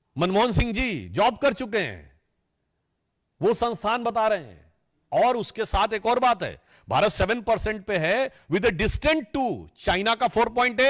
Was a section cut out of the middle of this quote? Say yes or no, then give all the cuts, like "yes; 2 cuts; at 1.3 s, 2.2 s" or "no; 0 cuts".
no; 0 cuts